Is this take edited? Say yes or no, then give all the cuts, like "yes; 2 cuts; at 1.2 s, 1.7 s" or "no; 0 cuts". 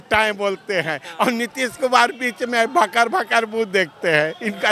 no; 0 cuts